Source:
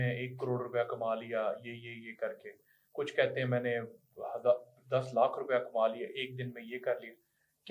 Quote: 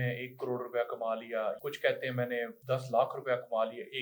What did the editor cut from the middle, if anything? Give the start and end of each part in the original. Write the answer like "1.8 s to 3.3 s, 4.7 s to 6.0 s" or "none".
1.6 s to 2.9 s, 3.9 s to 4.8 s